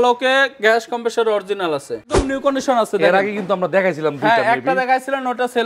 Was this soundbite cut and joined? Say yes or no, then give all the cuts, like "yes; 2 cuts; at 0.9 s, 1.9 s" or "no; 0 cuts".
yes; 1 cut; at 2.2 s